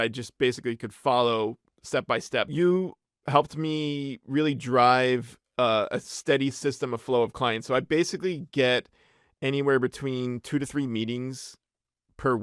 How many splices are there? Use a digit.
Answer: 1